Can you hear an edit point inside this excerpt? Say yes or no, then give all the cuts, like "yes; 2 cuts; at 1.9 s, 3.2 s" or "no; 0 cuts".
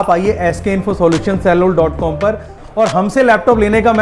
yes; 1 cut; at 2.6 s